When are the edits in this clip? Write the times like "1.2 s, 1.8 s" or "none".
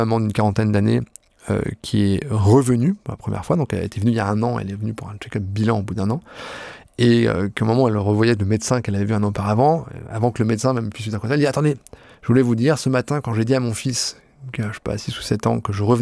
none